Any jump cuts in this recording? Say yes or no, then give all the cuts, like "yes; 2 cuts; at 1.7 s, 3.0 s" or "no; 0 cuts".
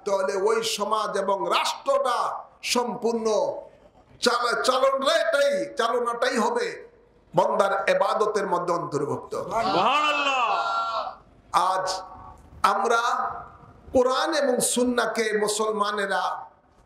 no; 0 cuts